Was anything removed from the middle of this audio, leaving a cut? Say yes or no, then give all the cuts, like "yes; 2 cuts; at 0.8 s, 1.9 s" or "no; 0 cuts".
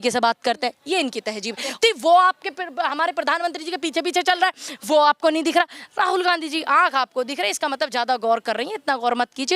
yes; 1 cut; at 1.7 s